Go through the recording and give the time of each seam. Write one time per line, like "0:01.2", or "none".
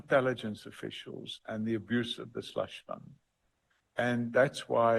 none